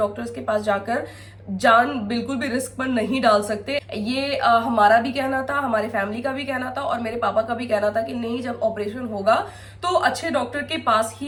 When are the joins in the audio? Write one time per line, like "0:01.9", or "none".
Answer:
none

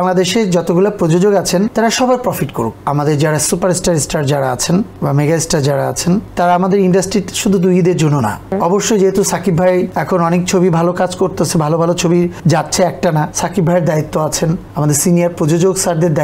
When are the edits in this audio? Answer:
0:01.7
0:02.8
0:04.9
0:06.3
0:08.5
0:10.0
0:12.4
0:13.3
0:14.7

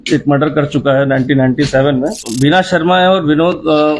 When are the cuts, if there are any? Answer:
0:02.2

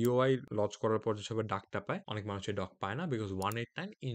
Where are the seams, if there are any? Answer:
none

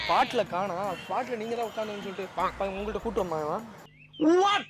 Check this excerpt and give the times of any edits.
0:03.7

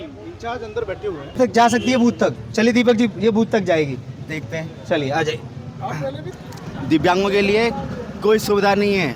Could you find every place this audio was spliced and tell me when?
0:01.3
0:06.3

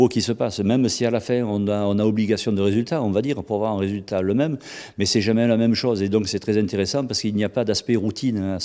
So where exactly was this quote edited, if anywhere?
none

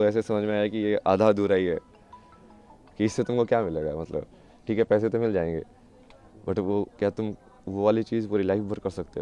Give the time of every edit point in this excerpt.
none

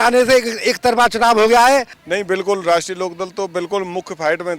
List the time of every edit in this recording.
0:01.9

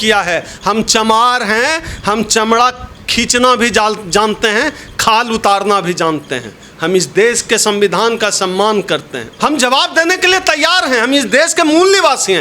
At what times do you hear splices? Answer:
0:09.3

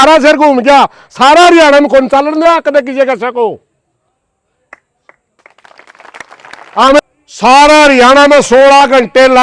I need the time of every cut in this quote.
0:07.0

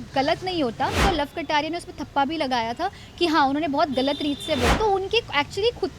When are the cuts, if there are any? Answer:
0:01.0
0:04.7

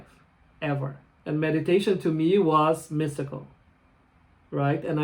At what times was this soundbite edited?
0:01.1

